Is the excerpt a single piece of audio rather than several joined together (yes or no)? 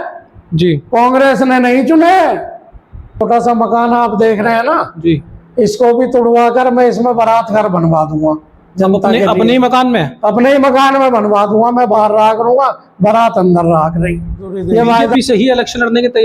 no